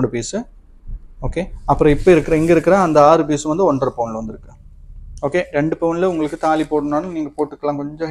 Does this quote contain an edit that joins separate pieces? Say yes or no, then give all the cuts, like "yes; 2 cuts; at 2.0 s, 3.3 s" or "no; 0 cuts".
no; 0 cuts